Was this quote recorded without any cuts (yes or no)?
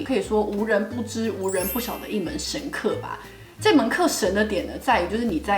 yes